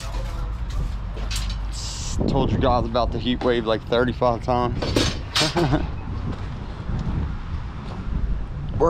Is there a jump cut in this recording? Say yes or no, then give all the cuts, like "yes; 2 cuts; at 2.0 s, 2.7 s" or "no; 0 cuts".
no; 0 cuts